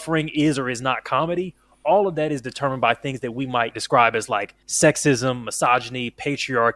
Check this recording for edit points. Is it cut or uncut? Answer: cut